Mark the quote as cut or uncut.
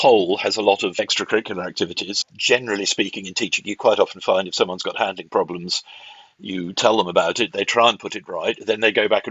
cut